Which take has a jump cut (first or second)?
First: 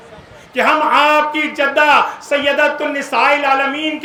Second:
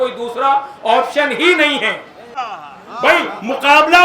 second